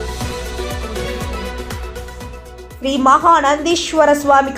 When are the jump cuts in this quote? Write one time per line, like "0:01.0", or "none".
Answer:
0:02.6